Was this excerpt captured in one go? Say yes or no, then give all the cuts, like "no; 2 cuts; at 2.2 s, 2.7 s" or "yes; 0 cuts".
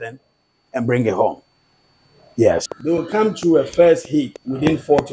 no; 1 cut; at 2.6 s